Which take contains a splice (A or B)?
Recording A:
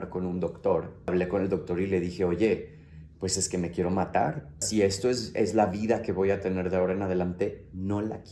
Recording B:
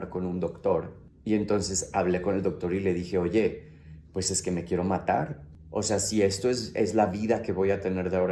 A